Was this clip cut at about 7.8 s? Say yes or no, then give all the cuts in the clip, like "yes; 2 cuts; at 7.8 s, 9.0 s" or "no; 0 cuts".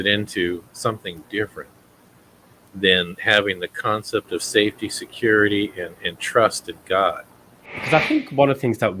yes; 1 cut; at 7.8 s